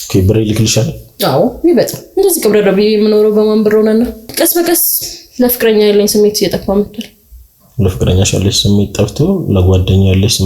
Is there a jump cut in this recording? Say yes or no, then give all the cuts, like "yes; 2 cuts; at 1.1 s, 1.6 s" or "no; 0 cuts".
yes; 1 cut; at 4.2 s